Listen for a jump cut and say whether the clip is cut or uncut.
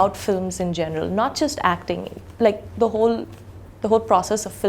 uncut